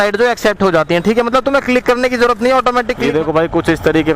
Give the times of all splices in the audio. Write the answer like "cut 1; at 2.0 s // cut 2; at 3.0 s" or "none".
cut 1; at 3.0 s